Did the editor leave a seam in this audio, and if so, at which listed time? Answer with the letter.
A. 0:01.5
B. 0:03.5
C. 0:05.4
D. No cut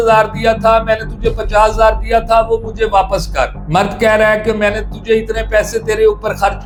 D